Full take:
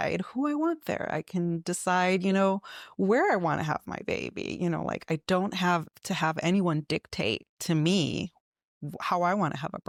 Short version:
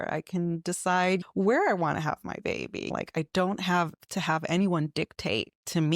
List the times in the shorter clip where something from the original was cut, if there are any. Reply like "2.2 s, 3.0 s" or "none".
1.2 s, 2.9 s